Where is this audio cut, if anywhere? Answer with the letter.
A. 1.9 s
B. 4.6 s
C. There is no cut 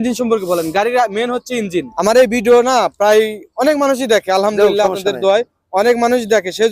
A